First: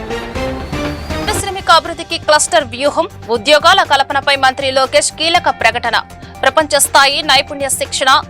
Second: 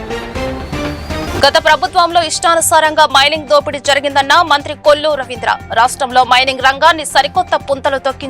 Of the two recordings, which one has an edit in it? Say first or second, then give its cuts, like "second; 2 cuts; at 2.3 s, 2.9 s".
second; 1 cut; at 1.2 s